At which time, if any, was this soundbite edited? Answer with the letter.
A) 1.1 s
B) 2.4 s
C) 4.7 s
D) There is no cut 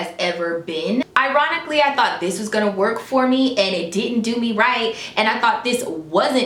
A